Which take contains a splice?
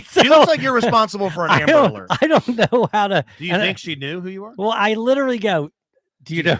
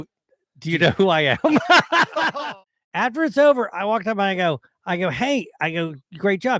second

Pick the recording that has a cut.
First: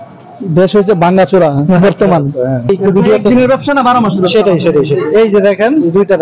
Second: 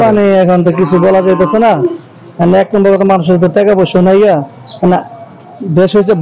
first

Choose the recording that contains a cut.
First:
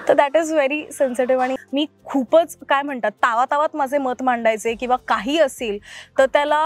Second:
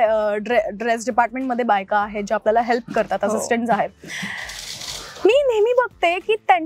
first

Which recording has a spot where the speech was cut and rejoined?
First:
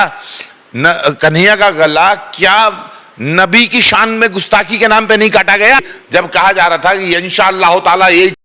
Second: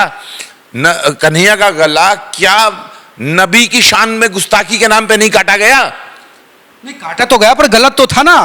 first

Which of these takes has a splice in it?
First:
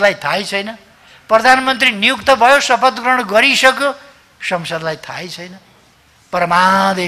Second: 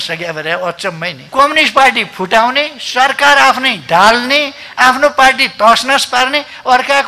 second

